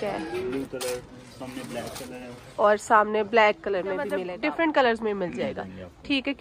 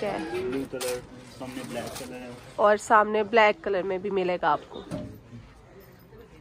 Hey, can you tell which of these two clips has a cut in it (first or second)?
first